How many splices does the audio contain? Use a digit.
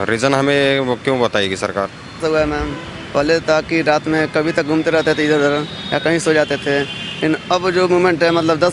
1